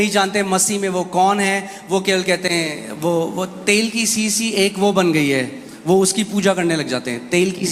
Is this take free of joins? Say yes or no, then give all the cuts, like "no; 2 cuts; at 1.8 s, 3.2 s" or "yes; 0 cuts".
yes; 0 cuts